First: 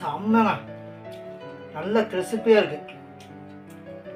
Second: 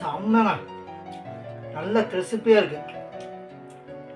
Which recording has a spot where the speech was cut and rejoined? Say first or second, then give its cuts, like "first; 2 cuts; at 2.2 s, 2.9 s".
second; 1 cut; at 2.8 s